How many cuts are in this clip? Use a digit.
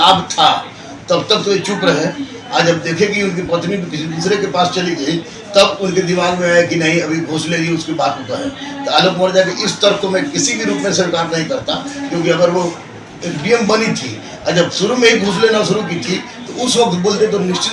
0